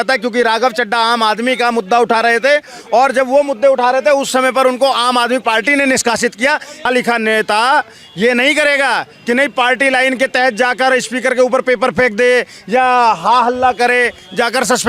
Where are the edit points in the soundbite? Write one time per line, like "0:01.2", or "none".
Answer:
0:06.9